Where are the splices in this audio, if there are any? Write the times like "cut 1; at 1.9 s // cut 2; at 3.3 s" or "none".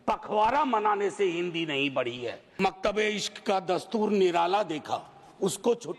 cut 1; at 2.4 s